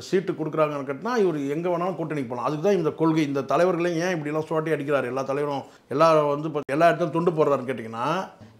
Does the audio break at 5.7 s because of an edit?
no; 0 cuts

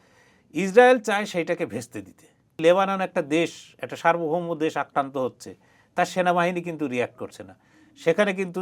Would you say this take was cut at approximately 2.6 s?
yes; 1 cut; at 2.6 s

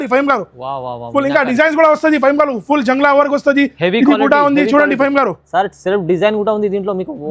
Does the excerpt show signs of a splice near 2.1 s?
no; 0 cuts

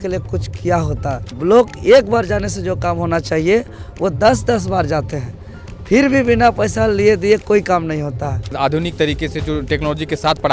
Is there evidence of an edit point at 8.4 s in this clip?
yes; 2 cuts; at 1.3 s, 8.4 s

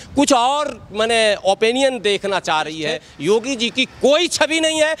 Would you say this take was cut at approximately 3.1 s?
yes; 1 cut; at 3.1 s

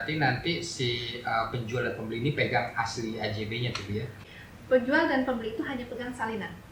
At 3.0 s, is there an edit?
no; 1 cut; at 4.2 s

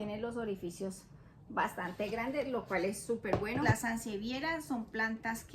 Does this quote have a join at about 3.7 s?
yes; 1 cut; at 3.7 s

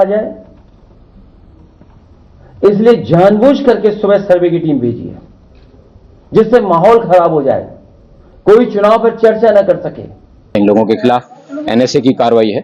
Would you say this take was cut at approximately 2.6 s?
no; 1 cut; at 10.5 s

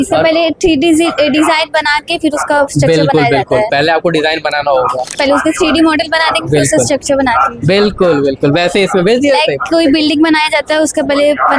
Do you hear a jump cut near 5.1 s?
yes; 1 cut; at 5.1 s

